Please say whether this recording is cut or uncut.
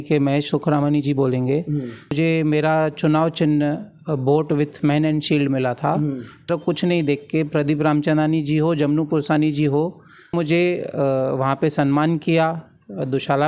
cut